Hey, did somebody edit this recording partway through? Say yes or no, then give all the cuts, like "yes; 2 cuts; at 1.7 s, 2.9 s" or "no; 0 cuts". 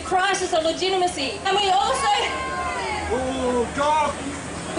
no; 0 cuts